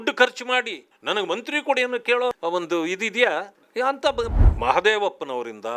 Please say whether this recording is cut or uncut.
cut